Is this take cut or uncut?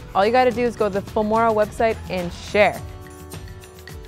cut